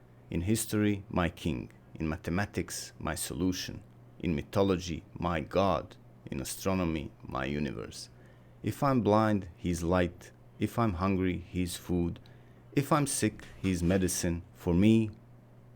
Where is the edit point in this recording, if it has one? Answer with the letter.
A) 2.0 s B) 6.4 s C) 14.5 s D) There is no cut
C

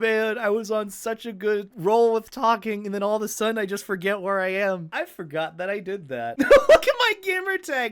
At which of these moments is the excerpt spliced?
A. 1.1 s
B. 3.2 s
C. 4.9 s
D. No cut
C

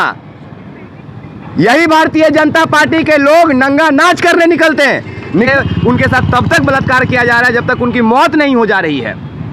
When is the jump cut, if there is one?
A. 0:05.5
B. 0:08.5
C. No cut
A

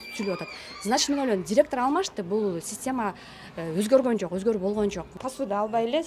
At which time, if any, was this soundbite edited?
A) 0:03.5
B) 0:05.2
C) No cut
B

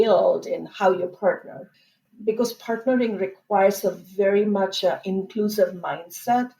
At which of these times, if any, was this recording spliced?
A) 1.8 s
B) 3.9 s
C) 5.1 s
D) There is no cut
A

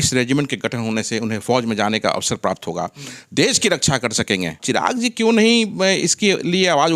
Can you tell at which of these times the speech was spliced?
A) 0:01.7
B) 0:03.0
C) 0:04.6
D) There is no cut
C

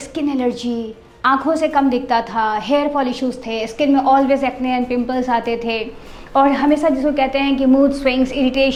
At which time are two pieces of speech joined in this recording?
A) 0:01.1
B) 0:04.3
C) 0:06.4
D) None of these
D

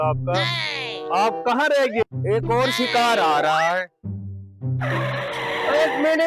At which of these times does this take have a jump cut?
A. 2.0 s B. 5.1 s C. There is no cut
A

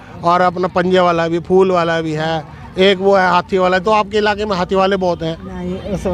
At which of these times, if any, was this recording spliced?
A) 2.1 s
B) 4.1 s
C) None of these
C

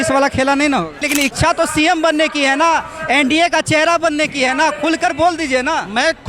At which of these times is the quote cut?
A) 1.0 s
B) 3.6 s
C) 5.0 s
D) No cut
A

